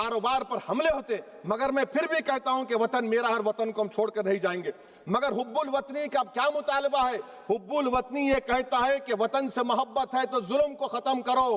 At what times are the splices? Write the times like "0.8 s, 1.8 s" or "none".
none